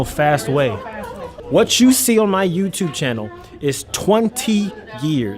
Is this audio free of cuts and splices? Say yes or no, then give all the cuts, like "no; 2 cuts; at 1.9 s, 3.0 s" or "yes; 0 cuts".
no; 1 cut; at 1.3 s